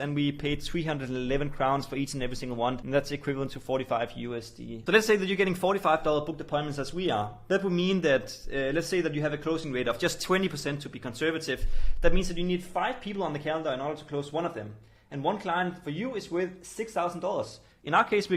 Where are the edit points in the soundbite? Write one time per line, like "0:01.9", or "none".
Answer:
0:02.8
0:04.7